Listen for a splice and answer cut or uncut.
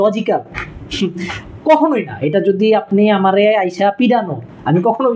uncut